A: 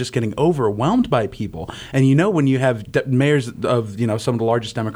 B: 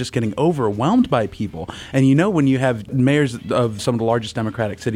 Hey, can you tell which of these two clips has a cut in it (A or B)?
B